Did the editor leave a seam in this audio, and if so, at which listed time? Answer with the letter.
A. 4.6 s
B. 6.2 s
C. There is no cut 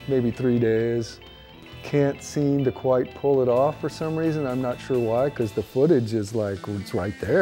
C